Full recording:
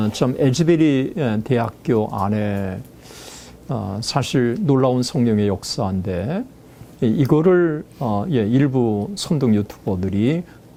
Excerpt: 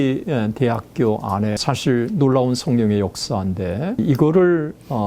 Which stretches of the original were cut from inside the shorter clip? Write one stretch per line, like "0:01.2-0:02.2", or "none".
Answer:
0:02.5-0:04.1
0:06.5-0:07.1